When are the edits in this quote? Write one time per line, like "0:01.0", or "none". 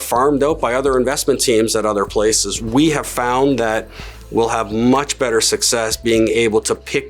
0:02.6